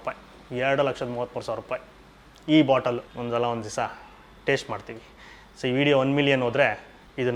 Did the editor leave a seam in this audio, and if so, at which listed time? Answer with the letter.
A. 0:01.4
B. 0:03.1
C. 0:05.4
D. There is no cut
B